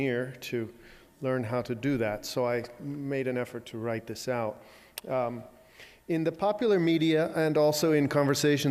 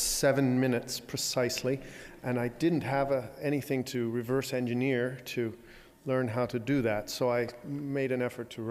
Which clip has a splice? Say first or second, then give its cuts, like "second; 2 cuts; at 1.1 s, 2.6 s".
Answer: second; 1 cut; at 3.5 s